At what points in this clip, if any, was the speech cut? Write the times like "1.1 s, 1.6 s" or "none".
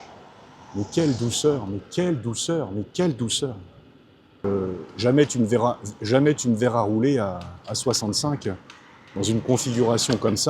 4.4 s